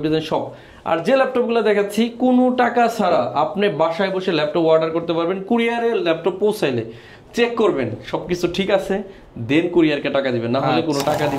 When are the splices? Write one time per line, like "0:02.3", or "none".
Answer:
none